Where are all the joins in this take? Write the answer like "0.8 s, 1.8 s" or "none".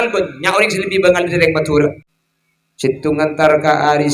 2.1 s